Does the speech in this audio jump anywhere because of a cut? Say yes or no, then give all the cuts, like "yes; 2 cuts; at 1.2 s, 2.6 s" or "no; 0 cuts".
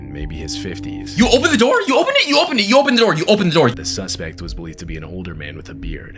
yes; 1 cut; at 3.8 s